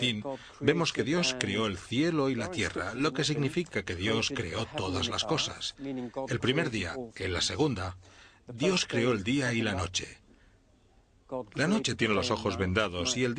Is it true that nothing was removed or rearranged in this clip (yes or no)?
no